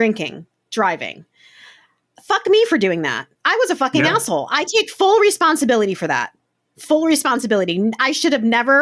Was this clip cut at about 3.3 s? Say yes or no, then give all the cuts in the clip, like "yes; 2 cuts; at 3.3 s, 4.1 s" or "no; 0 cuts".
yes; 1 cut; at 3.3 s